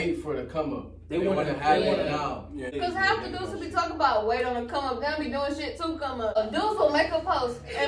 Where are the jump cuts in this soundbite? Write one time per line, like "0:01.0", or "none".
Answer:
0:02.7
0:06.4

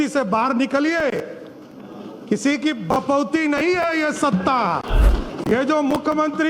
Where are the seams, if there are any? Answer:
0:05.1

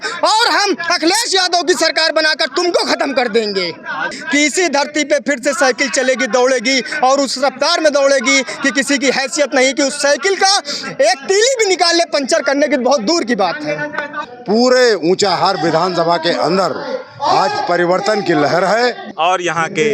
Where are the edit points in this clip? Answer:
0:04.2
0:14.2
0:19.0

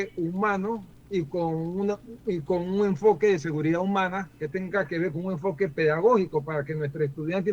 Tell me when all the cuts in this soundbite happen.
0:00.9

